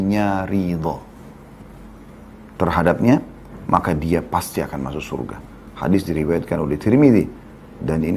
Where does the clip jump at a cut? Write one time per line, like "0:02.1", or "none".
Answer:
none